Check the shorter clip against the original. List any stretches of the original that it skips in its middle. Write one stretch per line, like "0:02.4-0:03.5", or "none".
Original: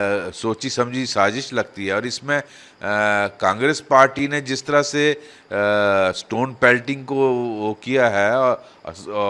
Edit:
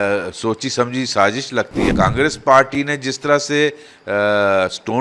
0:01.9-0:03.3